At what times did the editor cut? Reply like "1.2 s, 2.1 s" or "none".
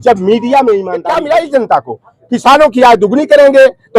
1.0 s